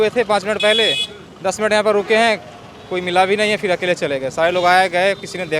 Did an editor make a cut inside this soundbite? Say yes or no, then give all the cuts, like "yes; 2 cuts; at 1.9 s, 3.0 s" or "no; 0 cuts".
no; 0 cuts